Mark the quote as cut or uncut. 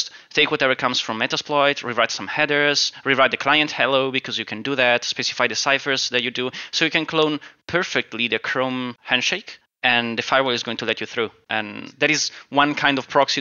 cut